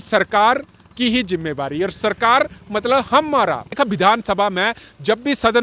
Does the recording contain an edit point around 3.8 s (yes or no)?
yes